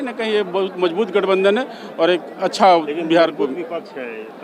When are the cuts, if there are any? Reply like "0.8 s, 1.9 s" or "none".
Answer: none

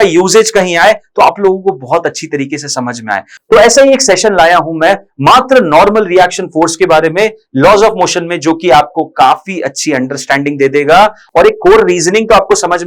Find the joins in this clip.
none

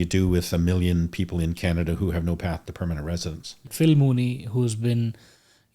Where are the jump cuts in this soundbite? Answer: 3.7 s

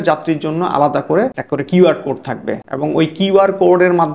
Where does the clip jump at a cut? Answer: 1.4 s, 2.6 s

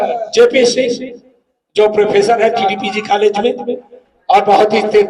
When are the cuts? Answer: 2.6 s

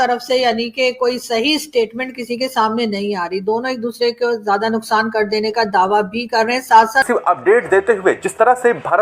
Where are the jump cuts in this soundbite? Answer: 7.1 s

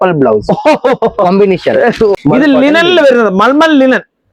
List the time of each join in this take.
2.2 s

